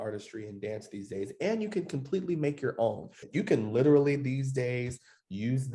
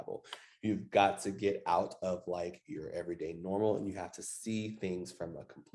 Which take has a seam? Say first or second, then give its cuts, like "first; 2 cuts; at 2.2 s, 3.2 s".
first; 1 cut; at 3.2 s